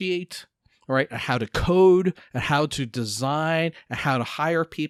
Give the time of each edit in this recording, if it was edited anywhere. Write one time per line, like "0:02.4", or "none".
none